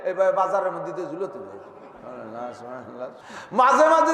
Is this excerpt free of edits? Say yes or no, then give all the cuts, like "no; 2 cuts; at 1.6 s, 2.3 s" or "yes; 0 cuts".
no; 1 cut; at 3.2 s